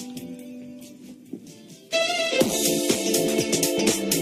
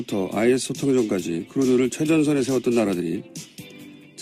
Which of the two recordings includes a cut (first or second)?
second